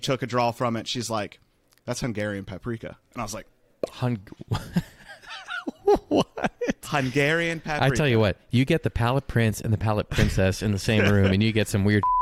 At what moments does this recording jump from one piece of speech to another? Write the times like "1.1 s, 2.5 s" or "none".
none